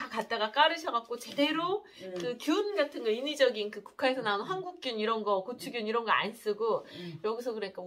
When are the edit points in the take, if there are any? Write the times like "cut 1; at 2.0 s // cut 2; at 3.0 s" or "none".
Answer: none